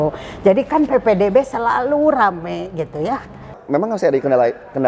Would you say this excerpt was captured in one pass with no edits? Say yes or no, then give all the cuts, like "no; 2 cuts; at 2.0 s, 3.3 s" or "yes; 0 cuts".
no; 1 cut; at 3.5 s